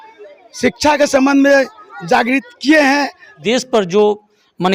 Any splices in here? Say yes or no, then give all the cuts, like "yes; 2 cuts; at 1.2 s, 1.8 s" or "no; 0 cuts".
yes; 1 cut; at 3.3 s